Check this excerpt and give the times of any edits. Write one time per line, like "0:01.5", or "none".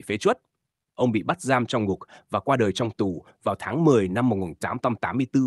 none